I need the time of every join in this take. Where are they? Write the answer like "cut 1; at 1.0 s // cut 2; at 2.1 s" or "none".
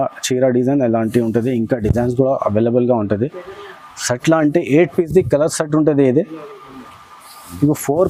none

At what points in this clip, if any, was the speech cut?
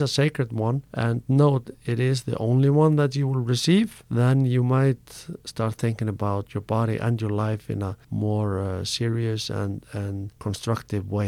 cut 1; at 0.9 s // cut 2; at 4.0 s // cut 3; at 8.0 s // cut 4; at 10.3 s

